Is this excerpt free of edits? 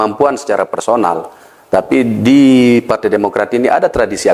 yes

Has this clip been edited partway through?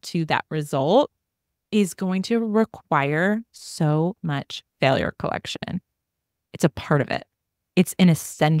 no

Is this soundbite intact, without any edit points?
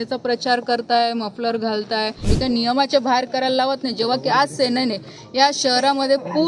no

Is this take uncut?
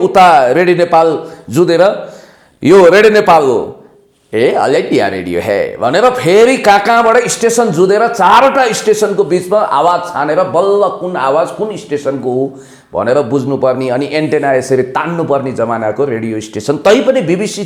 yes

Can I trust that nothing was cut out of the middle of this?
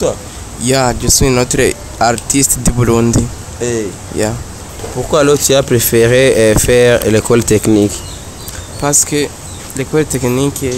no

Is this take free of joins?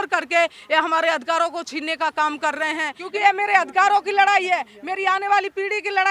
no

